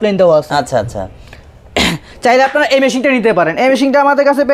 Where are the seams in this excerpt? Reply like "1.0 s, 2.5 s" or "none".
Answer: none